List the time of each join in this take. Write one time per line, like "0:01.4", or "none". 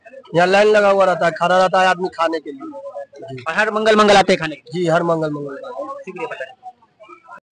none